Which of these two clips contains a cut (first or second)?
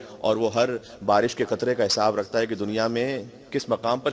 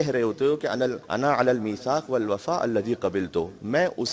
second